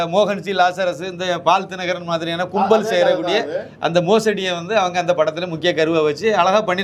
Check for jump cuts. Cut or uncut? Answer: uncut